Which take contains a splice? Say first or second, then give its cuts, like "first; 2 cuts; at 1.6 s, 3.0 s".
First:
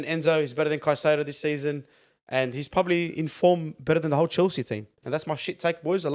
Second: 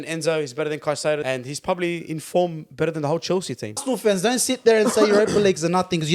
second; 2 cuts; at 1.2 s, 3.8 s